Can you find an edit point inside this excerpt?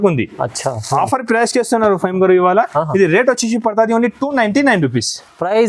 no; 0 cuts

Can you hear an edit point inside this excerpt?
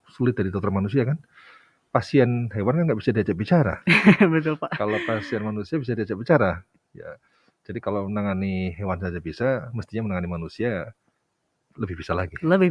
no; 0 cuts

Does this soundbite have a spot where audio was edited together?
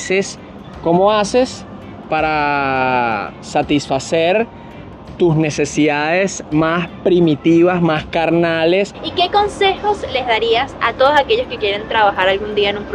yes; 1 cut; at 9.0 s

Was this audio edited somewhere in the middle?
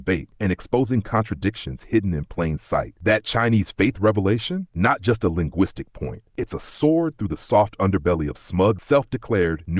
yes; 1 cut; at 8.8 s

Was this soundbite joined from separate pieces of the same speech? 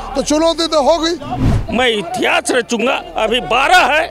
yes; 1 cut; at 1.6 s

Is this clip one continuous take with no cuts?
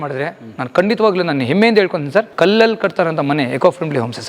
no; 1 cut; at 2.3 s

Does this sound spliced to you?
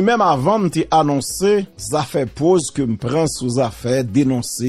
yes; 1 cut; at 1.8 s

